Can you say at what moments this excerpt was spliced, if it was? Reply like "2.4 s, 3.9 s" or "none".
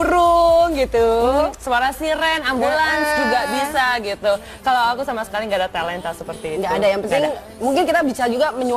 none